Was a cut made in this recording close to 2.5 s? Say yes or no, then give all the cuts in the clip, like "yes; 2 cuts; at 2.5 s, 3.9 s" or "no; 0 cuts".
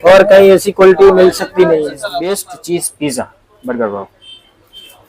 yes; 1 cut; at 2.5 s